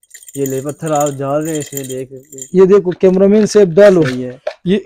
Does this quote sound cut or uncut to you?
uncut